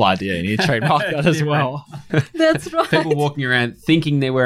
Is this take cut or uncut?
cut